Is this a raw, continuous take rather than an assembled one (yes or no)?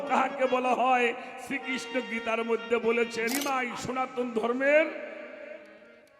no